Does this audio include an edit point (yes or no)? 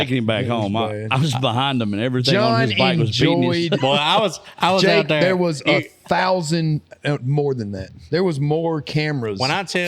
no